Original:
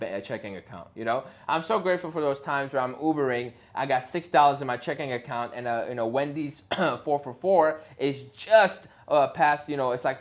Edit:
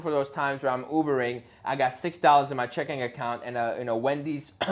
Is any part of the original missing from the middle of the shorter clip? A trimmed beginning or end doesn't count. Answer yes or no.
no